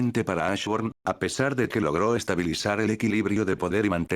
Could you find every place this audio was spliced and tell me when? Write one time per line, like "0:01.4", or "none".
0:03.1